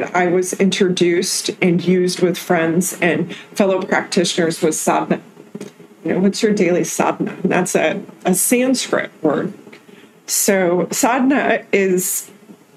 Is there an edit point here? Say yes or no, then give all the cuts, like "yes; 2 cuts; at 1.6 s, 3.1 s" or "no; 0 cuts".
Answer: no; 0 cuts